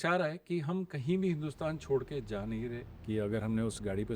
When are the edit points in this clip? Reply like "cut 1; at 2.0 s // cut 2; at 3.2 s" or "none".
cut 1; at 2.9 s

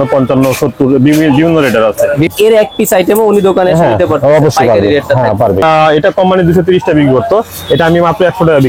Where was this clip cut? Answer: cut 1; at 2.3 s // cut 2; at 5.6 s

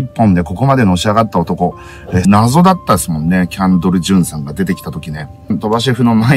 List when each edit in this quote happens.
cut 1; at 2.2 s // cut 2; at 5.5 s

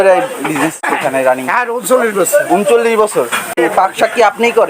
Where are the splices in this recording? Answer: cut 1; at 0.8 s // cut 2; at 3.5 s

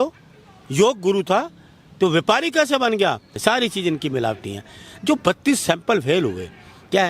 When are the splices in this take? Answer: cut 1; at 3.3 s

